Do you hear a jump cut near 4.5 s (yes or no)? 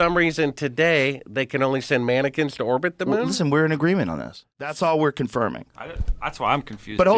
yes